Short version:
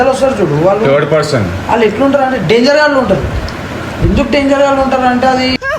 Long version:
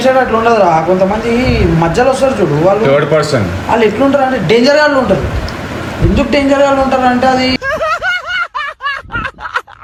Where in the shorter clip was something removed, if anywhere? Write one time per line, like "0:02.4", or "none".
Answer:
none